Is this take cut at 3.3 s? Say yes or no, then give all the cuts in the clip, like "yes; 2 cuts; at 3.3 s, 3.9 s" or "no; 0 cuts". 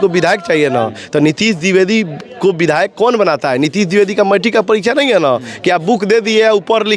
no; 0 cuts